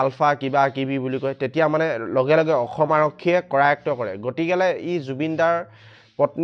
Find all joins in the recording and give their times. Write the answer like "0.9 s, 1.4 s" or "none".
none